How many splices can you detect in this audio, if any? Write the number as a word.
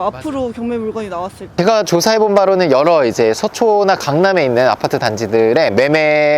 one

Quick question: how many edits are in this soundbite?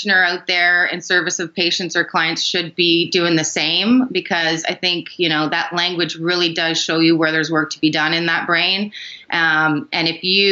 zero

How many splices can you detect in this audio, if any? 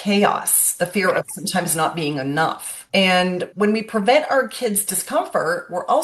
two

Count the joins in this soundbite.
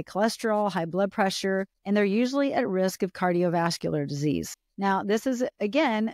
two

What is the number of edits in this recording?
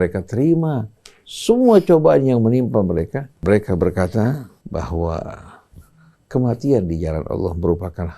two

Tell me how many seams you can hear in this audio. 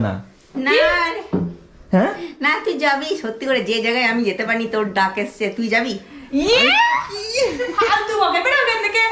zero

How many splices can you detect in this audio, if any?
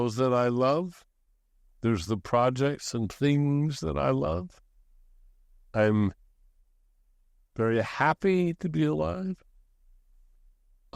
zero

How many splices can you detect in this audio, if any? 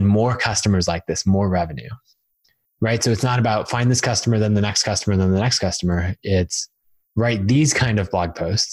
zero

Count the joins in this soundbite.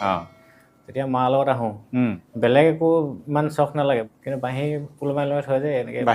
two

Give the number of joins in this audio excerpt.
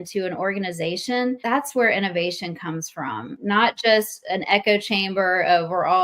two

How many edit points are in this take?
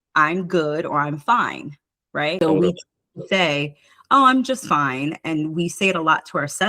one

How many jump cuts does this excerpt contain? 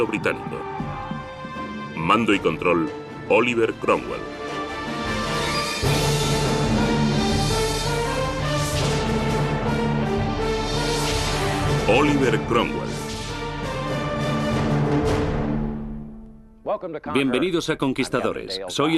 one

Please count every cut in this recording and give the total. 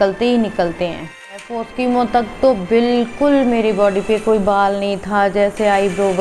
one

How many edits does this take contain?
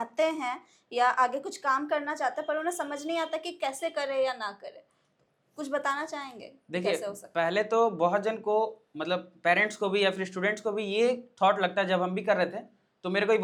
zero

